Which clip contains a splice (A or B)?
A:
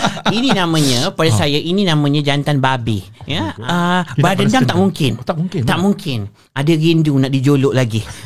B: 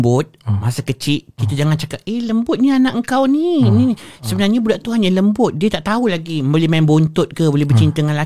A